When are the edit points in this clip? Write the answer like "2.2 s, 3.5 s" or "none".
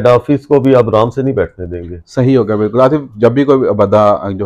none

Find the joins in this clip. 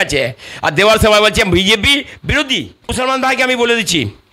2.9 s

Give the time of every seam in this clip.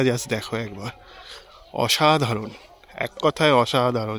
none

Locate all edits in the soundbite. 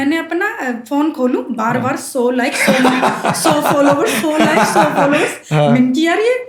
none

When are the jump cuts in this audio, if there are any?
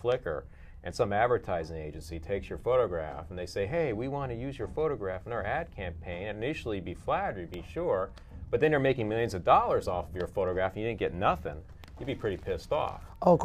none

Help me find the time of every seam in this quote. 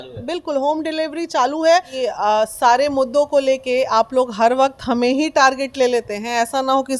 1.9 s

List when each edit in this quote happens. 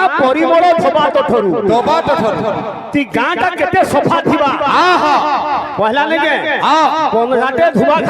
none

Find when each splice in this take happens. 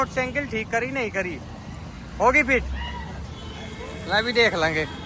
none

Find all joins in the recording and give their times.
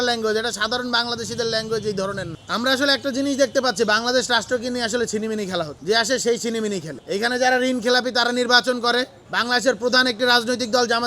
2.3 s, 9.2 s

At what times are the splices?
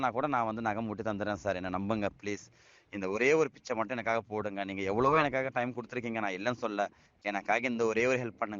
7.1 s

